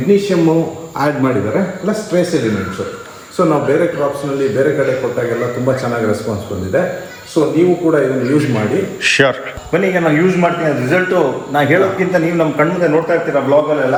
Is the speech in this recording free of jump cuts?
yes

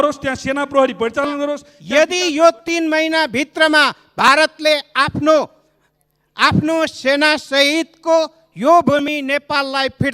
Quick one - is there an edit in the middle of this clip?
yes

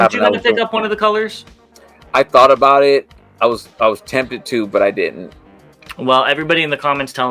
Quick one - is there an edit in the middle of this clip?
no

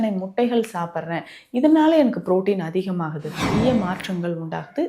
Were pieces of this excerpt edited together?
yes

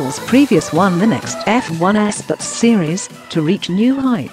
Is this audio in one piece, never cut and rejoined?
yes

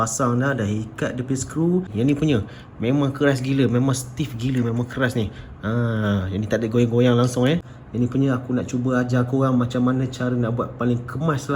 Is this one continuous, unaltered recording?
no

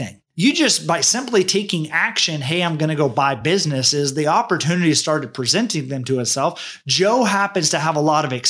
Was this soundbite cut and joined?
no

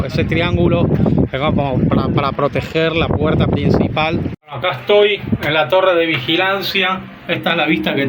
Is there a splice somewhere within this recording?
yes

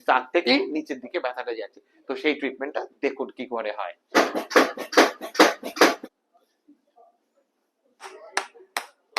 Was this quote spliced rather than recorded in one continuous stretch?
yes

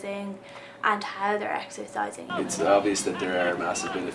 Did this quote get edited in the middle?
yes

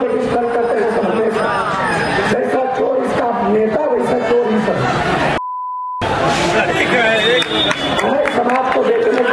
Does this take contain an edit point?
no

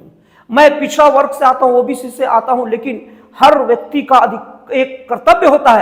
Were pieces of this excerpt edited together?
no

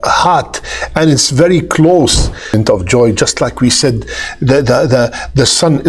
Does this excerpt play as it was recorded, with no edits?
no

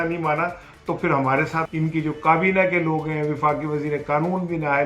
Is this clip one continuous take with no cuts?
no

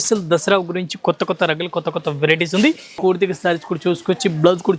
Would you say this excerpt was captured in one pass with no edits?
no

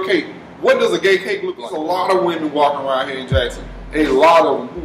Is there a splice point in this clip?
yes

